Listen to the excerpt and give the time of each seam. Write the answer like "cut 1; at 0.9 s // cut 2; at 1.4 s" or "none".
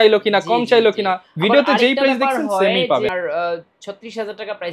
cut 1; at 3.1 s

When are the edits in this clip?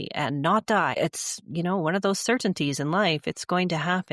cut 1; at 0.9 s

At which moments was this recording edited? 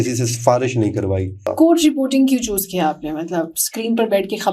cut 1; at 1.4 s

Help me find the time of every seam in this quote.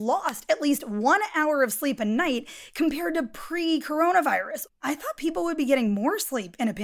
cut 1; at 4.8 s

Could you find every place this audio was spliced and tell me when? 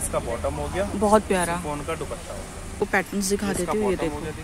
cut 1; at 2.7 s

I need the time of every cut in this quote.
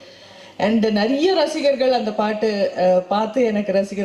none

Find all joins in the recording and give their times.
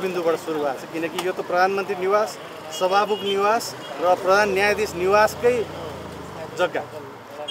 none

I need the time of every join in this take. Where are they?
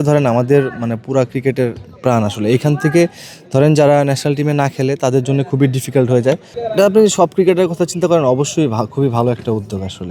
cut 1; at 6.5 s

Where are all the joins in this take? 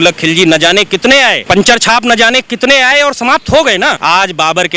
cut 1; at 1.4 s // cut 2; at 4.0 s

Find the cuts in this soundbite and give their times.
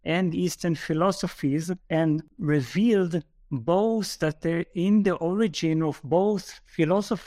none

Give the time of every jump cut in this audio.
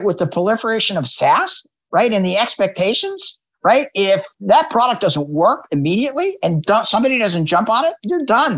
cut 1; at 4.3 s

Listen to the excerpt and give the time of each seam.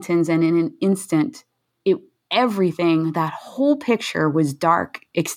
none

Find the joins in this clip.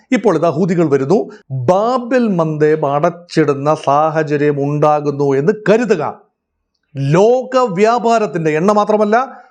cut 1; at 1.4 s

